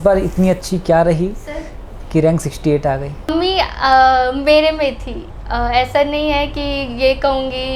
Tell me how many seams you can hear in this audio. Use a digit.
0